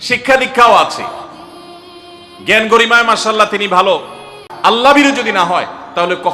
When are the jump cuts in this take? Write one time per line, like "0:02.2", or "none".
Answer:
0:04.5